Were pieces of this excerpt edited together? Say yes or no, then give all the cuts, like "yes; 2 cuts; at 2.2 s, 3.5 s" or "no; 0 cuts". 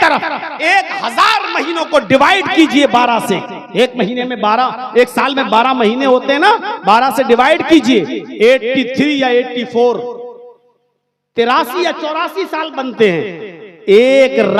no; 0 cuts